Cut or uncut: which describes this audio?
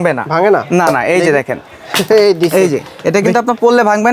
uncut